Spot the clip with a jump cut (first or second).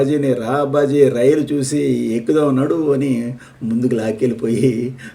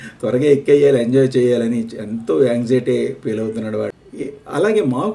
second